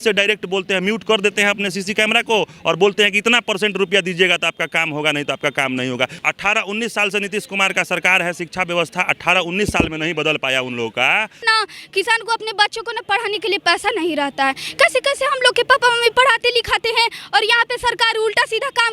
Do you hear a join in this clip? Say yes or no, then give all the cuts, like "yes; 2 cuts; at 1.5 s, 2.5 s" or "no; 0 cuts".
yes; 2 cuts; at 6.2 s, 11.4 s